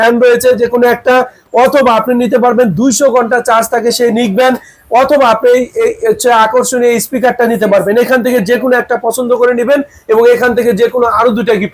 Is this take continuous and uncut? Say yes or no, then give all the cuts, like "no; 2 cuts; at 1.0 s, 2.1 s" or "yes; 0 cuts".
yes; 0 cuts